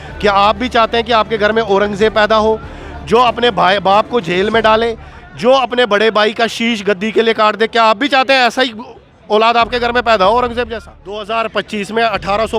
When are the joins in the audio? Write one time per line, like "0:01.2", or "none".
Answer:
0:11.3